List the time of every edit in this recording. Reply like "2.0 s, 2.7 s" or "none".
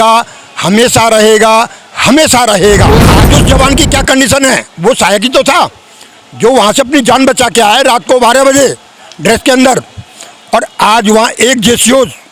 3.2 s